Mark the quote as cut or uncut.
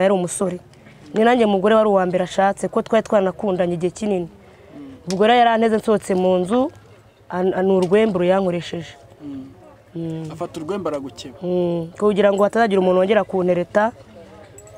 uncut